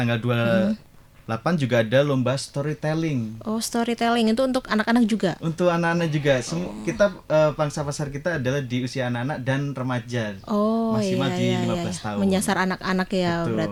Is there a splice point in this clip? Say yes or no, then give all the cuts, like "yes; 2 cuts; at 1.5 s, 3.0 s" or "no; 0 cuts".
no; 0 cuts